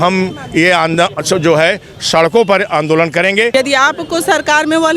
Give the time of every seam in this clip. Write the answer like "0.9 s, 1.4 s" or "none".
3.5 s